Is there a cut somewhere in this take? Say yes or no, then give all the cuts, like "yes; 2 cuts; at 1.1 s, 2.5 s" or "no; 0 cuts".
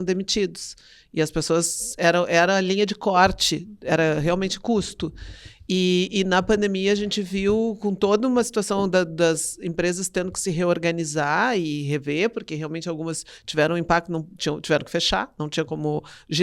no; 0 cuts